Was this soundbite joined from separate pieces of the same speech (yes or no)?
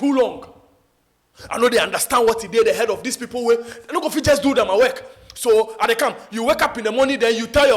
no